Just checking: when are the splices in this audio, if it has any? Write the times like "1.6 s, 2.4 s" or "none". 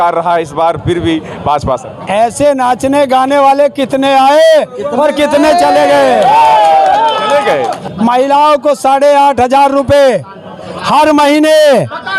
7.8 s